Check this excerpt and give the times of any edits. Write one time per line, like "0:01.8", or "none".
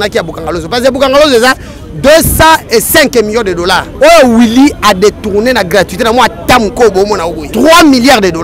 0:03.9
0:07.4